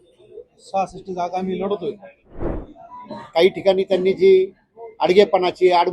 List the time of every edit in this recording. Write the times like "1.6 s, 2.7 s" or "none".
2.5 s